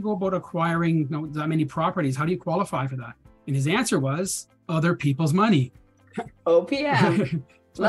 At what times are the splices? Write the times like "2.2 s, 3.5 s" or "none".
none